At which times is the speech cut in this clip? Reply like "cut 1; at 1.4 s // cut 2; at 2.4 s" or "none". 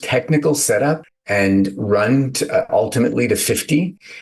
cut 1; at 1.1 s